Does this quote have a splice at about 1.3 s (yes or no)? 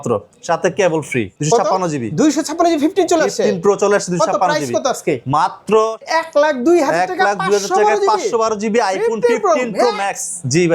yes